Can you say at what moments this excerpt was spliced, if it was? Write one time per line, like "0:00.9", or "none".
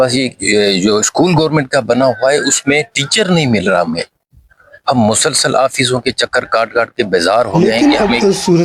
0:07.7